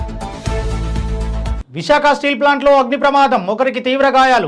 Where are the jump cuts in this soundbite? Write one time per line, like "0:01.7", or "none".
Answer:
0:01.6